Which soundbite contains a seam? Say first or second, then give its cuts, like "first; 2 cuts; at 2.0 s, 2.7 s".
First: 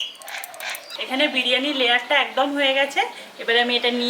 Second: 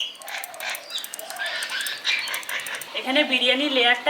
first; 1 cut; at 0.9 s